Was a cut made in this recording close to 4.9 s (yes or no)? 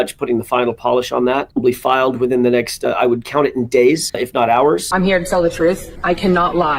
yes